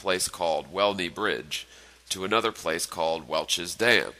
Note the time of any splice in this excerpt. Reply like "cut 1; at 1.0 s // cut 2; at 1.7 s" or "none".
none

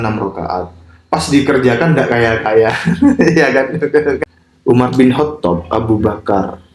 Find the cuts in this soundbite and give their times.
cut 1; at 4.3 s

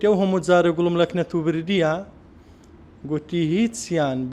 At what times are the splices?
none

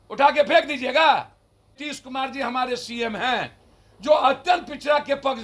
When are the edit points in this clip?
cut 1; at 1.8 s

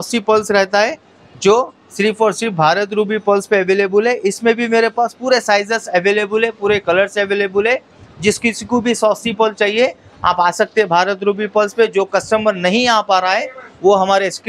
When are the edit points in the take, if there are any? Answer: none

